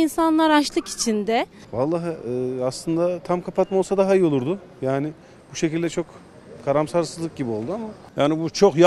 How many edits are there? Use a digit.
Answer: 2